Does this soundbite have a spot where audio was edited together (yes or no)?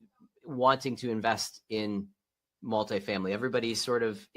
no